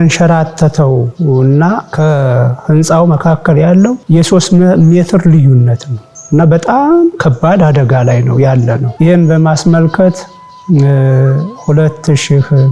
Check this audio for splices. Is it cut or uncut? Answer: cut